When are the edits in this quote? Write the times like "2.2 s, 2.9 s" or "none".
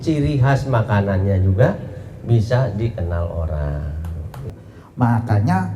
4.4 s